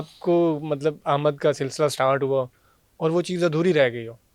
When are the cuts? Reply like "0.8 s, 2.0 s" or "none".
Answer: none